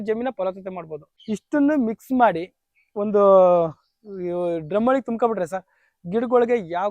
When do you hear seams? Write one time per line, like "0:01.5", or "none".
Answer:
0:01.1